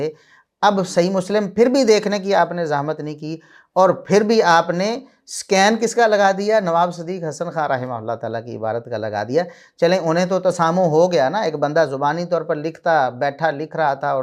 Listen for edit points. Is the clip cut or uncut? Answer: uncut